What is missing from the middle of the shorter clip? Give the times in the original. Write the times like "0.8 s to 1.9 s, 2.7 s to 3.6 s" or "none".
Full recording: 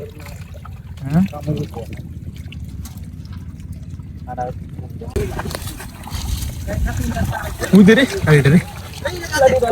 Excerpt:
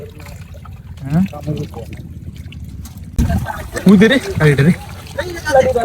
3.2 s to 7.0 s